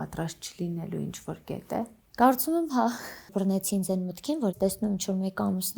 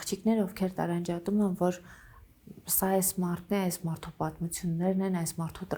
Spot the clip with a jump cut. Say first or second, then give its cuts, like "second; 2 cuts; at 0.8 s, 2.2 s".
first; 3 cuts; at 2.0 s, 3.3 s, 4.5 s